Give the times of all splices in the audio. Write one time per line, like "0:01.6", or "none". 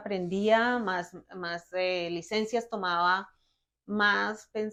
none